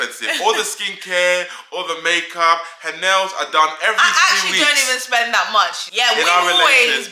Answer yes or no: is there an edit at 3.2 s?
no